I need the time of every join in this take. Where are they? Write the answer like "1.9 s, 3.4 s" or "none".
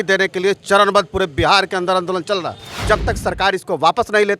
2.8 s